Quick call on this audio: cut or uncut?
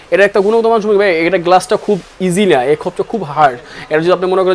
uncut